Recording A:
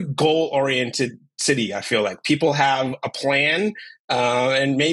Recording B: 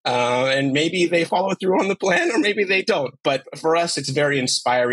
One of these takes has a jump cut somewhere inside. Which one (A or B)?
B